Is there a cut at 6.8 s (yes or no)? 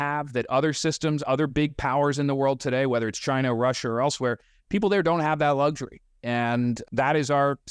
yes